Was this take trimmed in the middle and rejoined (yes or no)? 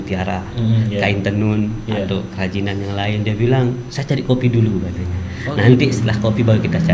no